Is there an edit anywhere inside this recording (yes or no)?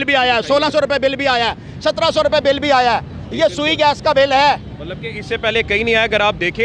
no